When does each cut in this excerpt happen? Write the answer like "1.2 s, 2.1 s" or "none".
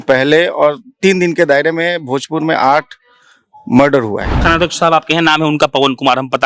4.4 s